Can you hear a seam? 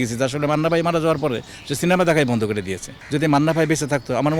yes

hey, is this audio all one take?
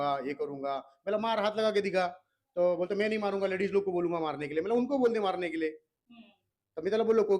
yes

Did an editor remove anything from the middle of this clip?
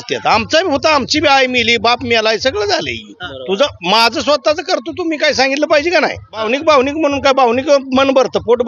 yes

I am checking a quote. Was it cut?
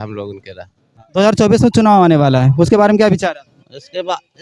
yes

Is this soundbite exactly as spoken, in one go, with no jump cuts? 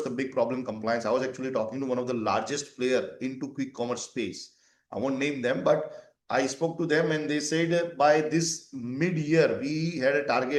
yes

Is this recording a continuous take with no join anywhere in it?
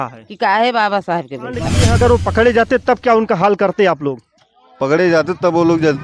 no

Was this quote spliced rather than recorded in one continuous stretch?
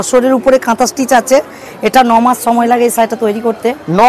no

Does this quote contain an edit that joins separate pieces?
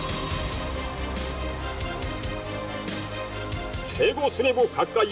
no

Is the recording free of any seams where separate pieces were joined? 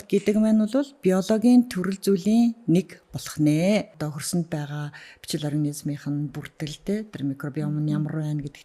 no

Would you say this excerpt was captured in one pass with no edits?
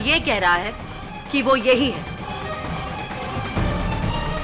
yes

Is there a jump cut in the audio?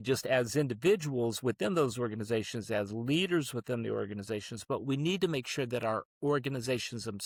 no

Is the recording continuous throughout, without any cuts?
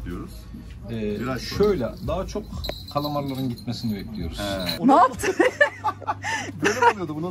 no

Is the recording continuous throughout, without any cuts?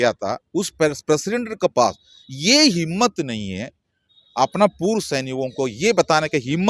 yes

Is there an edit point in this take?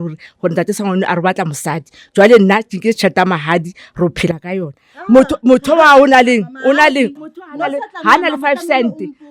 yes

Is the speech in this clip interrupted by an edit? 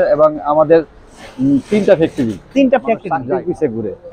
yes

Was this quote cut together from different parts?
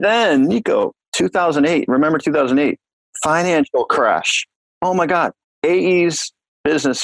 yes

